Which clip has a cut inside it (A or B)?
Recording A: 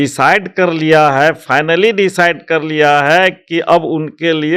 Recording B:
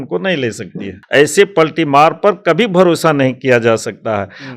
B